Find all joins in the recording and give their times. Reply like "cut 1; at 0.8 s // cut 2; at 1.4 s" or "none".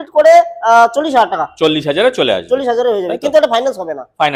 none